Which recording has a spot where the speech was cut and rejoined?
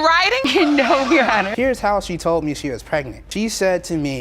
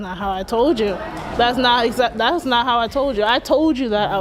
first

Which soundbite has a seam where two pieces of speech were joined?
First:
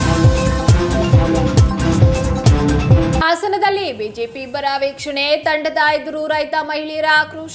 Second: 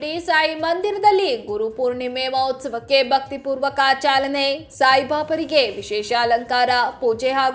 first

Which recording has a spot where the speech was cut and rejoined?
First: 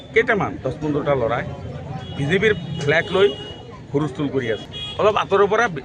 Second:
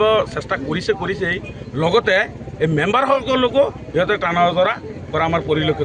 first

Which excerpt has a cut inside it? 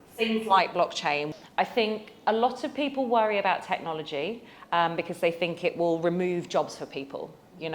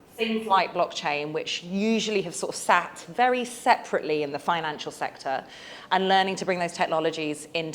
first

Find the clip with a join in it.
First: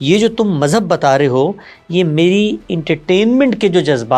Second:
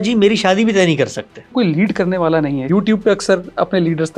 second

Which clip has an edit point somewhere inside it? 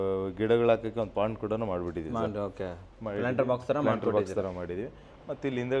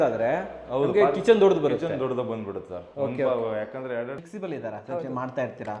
second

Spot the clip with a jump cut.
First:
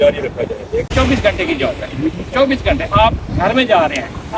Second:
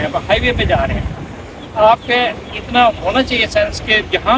first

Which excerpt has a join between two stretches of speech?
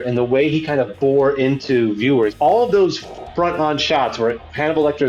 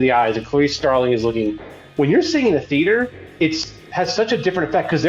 first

